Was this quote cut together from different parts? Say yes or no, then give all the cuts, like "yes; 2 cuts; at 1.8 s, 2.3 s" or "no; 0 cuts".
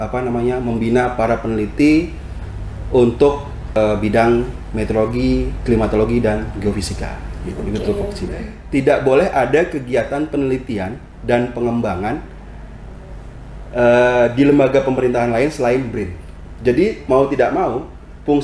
yes; 2 cuts; at 3.8 s, 8.5 s